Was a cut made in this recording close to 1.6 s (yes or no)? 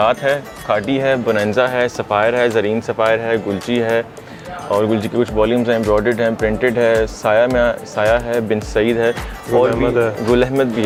no